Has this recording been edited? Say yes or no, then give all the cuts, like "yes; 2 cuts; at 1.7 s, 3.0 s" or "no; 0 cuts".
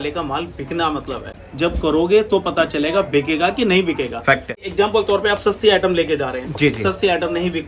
yes; 2 cuts; at 1.3 s, 4.7 s